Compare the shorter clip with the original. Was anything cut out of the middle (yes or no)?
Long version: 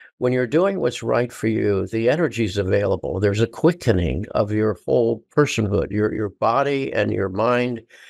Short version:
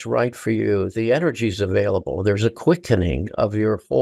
no